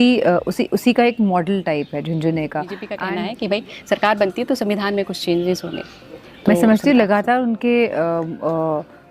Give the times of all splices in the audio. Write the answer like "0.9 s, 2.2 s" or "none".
3.0 s